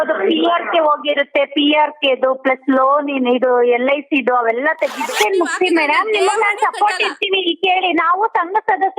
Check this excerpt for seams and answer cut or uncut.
cut